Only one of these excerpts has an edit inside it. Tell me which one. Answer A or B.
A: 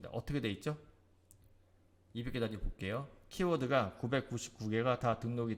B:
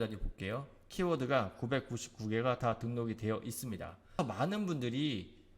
B